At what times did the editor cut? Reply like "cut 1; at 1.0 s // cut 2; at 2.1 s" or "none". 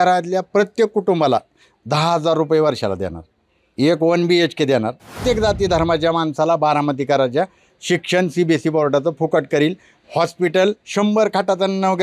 cut 1; at 5.2 s